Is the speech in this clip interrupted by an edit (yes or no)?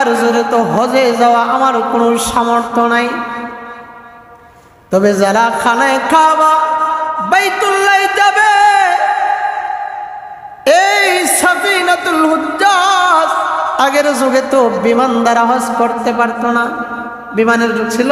no